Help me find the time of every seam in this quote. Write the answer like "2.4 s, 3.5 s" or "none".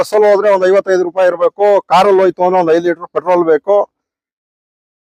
none